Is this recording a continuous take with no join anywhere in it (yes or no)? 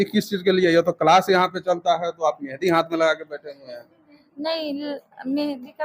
yes